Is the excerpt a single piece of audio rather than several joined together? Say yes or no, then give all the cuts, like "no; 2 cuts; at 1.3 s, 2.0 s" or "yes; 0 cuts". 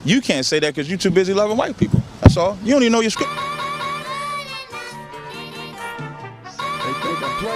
no; 1 cut; at 3.2 s